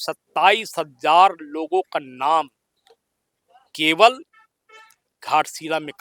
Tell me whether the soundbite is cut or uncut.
uncut